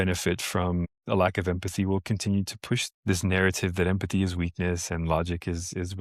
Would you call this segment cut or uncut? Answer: cut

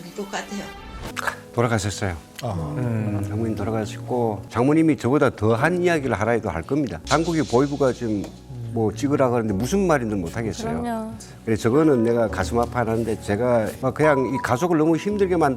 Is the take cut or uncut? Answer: cut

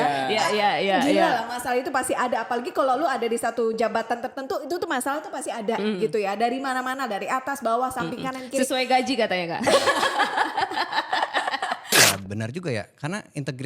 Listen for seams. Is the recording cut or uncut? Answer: cut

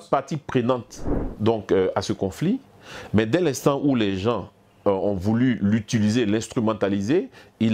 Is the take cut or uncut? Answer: uncut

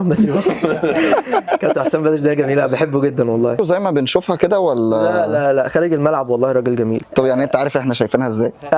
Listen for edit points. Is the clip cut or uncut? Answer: cut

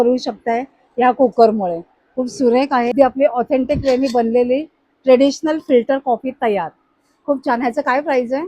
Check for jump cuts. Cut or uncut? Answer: cut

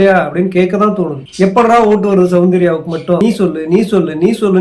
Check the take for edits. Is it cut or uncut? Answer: cut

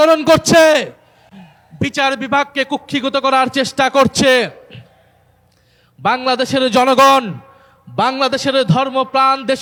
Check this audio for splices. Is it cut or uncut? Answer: uncut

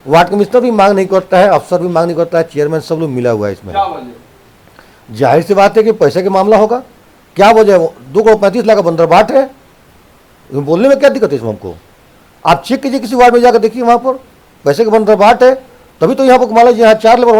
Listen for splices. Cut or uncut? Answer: uncut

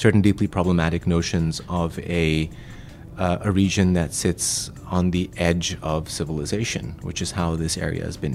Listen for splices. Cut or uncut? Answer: uncut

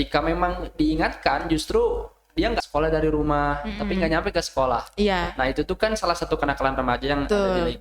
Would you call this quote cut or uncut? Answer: cut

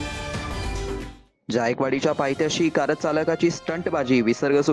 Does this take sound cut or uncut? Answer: uncut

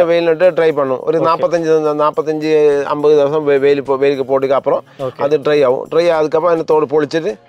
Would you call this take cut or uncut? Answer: uncut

